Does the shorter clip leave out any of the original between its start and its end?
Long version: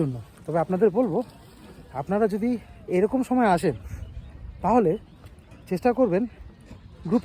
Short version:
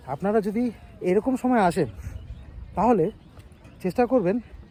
no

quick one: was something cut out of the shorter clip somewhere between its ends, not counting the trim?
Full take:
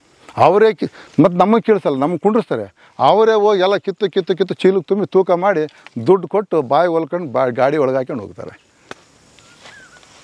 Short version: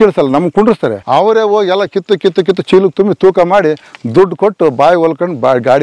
yes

